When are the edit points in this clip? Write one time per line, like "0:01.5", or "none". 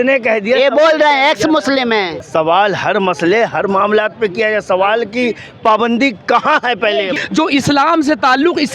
0:02.2
0:07.1